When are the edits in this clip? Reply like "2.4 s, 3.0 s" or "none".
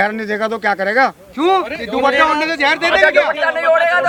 none